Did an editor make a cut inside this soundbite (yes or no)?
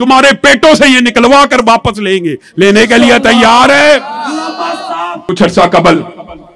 yes